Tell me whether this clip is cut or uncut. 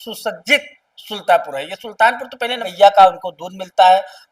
cut